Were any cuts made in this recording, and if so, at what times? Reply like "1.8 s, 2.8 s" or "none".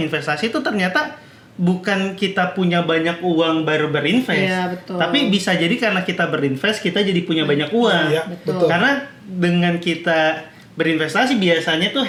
none